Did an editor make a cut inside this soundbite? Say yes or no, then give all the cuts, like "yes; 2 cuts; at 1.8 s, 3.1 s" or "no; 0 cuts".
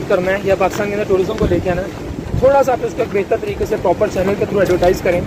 no; 0 cuts